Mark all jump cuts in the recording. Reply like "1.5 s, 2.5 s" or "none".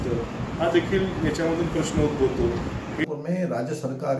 3.0 s